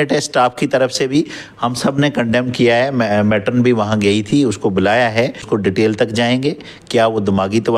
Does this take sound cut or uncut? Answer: cut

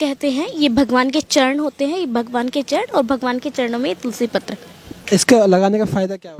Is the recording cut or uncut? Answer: uncut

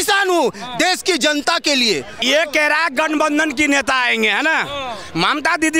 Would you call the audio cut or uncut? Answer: cut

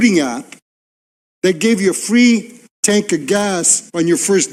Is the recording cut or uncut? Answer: uncut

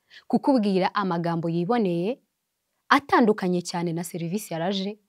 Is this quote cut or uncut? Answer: uncut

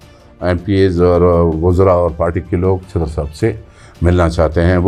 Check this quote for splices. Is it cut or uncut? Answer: uncut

